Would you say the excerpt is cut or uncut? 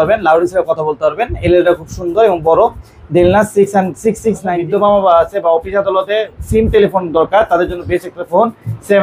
cut